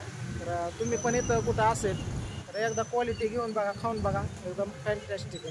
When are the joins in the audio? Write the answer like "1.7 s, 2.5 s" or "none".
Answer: none